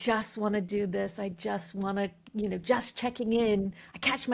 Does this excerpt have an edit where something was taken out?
no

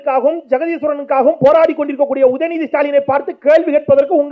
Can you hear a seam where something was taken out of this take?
no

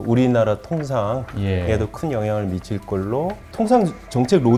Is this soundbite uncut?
no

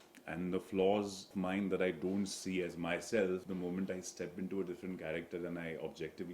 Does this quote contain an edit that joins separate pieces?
yes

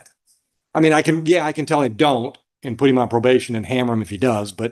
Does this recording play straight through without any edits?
yes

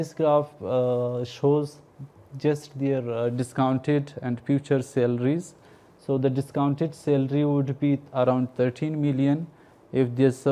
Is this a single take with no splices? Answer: yes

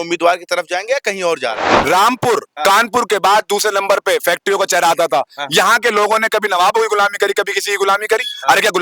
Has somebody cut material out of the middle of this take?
yes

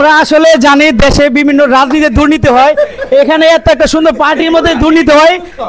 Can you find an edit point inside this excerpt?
no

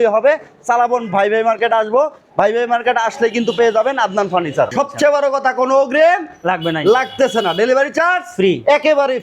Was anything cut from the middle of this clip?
yes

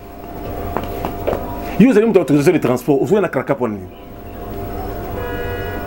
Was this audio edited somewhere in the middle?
no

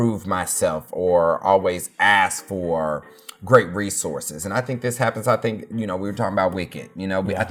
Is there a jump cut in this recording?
no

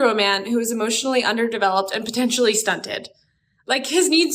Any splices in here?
yes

